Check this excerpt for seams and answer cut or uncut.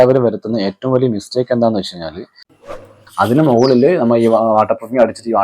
cut